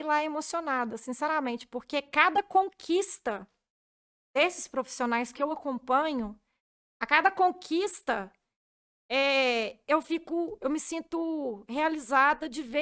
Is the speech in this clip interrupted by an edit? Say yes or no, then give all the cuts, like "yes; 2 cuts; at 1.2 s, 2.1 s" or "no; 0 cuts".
no; 0 cuts